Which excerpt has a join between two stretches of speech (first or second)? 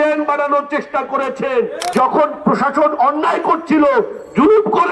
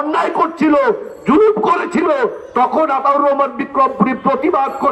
first